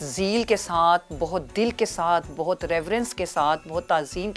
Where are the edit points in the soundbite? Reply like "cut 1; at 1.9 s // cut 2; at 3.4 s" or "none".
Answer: none